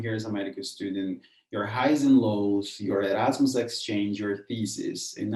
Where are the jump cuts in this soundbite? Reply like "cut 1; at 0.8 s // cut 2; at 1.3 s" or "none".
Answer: none